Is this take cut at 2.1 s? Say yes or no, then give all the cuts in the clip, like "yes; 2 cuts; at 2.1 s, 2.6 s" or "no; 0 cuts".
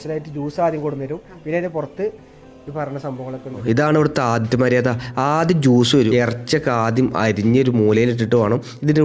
no; 2 cuts; at 3.6 s, 6.1 s